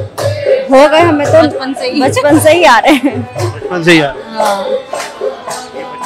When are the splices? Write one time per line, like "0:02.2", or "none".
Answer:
none